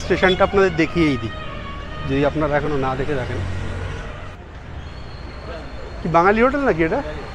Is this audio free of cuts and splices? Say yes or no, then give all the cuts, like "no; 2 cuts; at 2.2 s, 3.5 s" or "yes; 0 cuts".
no; 1 cut; at 4.4 s